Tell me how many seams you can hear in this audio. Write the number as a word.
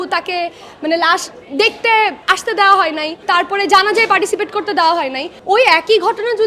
three